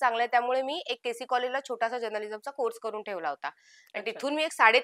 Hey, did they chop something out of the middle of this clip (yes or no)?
no